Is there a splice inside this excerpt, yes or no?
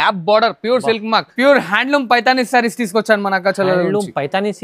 yes